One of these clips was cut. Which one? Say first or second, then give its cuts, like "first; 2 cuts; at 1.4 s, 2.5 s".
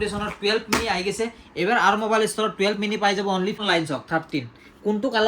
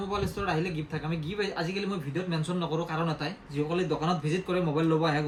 first; 1 cut; at 3.6 s